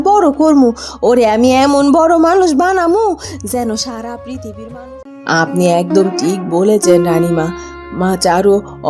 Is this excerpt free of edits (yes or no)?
no